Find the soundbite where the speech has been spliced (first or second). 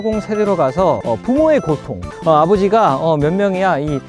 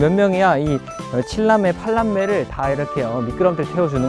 first